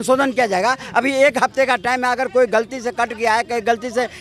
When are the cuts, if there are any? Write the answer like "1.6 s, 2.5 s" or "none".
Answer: none